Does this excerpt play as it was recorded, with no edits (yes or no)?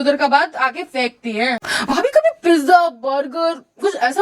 no